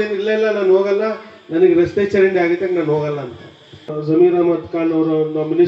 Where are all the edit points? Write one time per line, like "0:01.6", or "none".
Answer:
0:03.9